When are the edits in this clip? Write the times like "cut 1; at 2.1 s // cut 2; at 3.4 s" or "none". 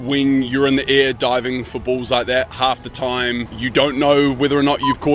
cut 1; at 2.5 s // cut 2; at 3.6 s